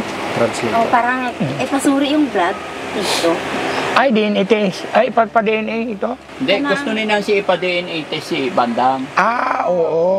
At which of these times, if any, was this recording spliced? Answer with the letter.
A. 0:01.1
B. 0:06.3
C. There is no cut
B